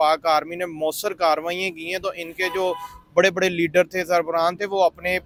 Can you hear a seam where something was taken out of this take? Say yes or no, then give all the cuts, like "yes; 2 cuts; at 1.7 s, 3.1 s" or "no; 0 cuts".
no; 0 cuts